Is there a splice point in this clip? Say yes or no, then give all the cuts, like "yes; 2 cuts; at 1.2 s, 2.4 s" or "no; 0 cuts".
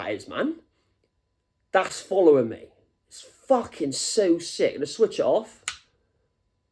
no; 0 cuts